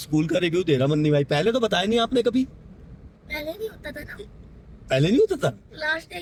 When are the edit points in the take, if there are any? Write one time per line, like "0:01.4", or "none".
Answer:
none